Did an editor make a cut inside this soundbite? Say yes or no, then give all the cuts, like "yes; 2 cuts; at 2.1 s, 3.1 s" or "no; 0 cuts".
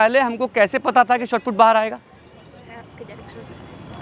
no; 0 cuts